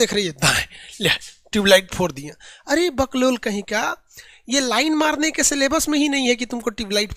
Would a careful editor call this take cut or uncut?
uncut